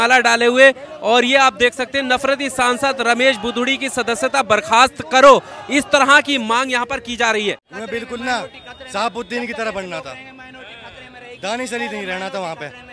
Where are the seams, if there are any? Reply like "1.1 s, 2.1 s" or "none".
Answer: 7.7 s